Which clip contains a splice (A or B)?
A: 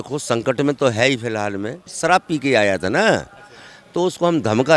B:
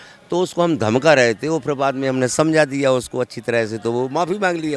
A